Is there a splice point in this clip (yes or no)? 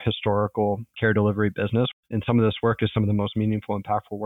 yes